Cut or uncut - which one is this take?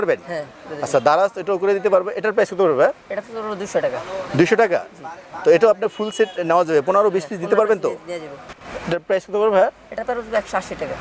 cut